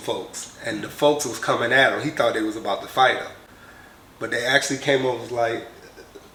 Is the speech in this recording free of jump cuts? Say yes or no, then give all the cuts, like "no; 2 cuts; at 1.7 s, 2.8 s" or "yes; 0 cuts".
yes; 0 cuts